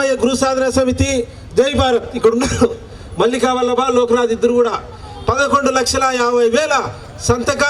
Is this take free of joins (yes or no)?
yes